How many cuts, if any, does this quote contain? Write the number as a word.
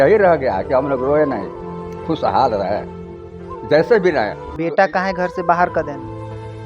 one